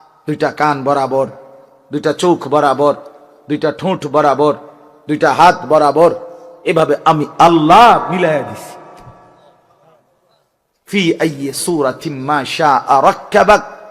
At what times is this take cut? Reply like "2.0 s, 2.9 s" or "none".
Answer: 9.5 s